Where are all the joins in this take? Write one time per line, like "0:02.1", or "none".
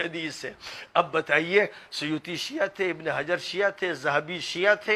none